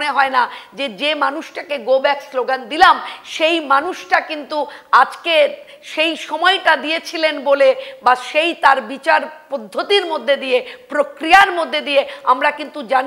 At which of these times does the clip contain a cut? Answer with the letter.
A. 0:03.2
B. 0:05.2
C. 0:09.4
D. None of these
D